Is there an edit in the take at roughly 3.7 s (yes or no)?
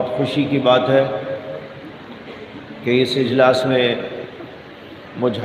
no